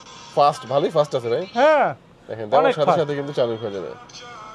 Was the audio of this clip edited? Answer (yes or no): no